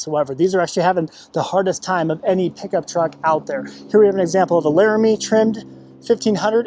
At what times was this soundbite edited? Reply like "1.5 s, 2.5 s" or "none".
none